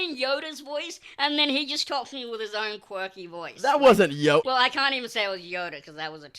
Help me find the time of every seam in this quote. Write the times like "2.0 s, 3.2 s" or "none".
4.4 s